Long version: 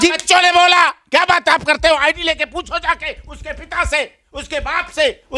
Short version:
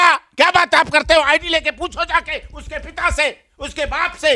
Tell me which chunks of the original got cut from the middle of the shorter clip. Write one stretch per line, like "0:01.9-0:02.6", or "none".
none